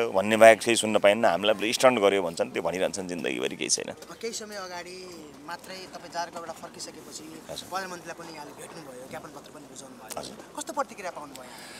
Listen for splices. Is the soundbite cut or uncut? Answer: uncut